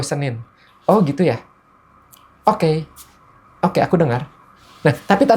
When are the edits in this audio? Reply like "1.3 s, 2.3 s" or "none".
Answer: none